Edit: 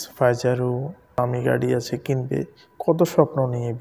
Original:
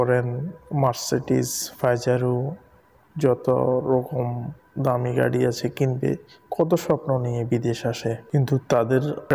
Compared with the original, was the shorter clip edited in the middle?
yes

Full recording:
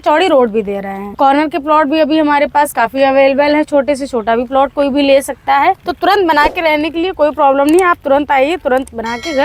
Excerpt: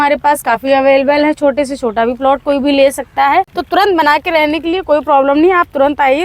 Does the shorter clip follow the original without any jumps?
yes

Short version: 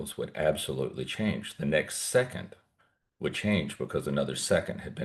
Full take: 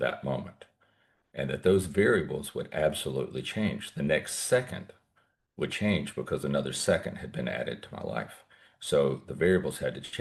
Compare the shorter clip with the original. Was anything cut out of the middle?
no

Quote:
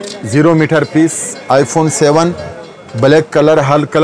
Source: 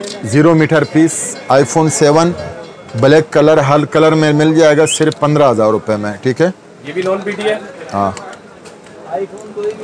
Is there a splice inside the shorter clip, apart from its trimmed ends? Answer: no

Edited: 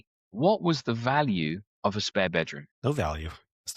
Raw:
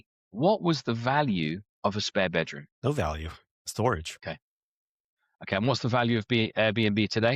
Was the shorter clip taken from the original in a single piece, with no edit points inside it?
yes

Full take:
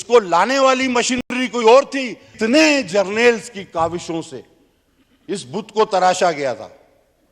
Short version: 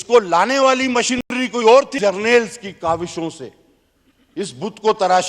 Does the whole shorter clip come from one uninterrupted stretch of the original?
no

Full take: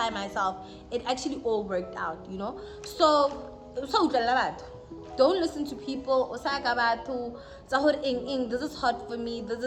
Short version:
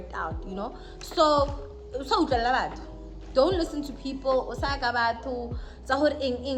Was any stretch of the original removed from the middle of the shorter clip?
no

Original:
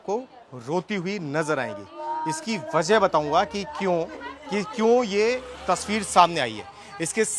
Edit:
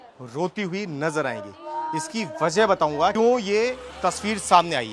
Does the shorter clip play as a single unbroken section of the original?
no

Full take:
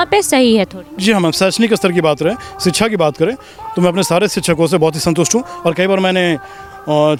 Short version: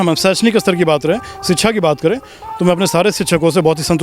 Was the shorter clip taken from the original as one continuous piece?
yes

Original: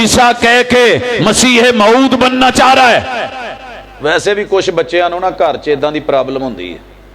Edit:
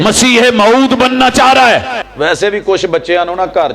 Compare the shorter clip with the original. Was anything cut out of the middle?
yes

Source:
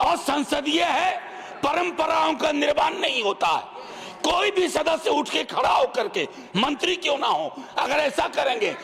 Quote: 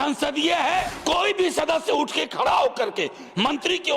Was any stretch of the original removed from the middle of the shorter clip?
yes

